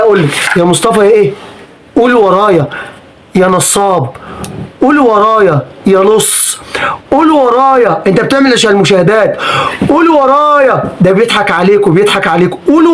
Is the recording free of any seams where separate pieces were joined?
yes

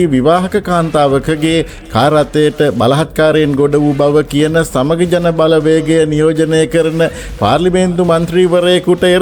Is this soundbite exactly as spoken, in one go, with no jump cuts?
yes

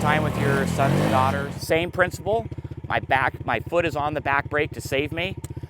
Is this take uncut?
no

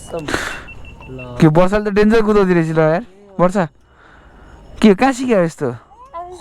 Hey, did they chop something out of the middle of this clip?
no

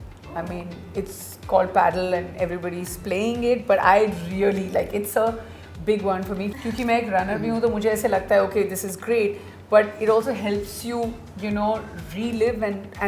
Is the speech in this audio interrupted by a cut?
yes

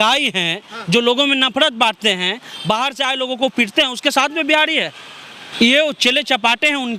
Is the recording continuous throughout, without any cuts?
yes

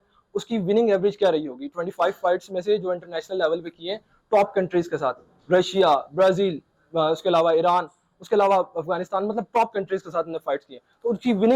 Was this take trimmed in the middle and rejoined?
no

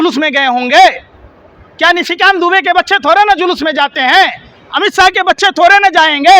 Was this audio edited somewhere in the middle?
no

